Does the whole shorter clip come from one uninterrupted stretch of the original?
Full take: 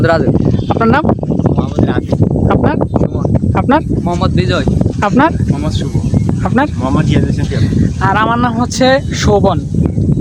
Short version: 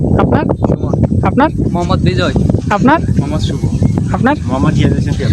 yes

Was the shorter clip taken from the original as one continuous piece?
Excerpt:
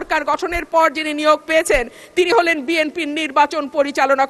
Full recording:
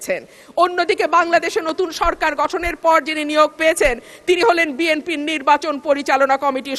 yes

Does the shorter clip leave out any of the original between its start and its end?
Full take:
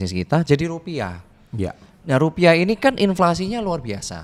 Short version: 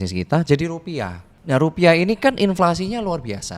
yes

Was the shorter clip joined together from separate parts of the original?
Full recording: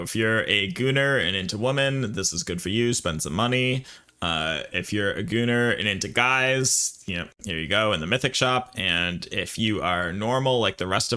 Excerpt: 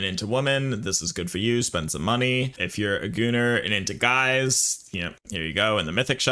yes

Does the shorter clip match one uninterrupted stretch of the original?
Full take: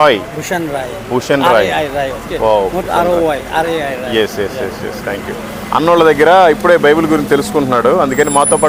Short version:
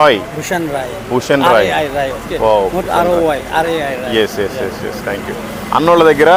yes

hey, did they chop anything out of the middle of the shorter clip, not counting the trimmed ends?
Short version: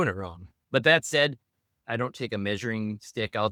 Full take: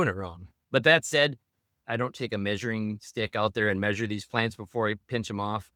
no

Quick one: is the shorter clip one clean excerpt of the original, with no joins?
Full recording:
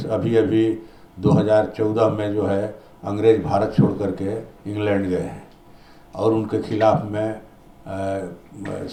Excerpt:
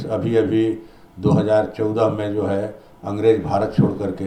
yes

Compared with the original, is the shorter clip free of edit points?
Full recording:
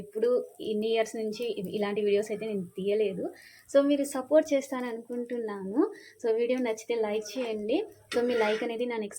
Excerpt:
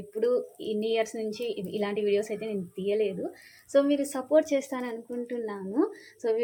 yes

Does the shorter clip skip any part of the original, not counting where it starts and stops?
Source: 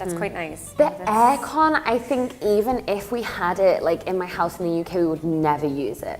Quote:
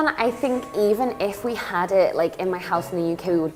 no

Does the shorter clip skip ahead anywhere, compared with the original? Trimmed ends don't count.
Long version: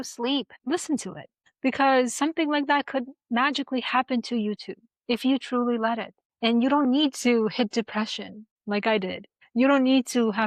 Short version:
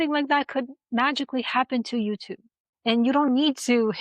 yes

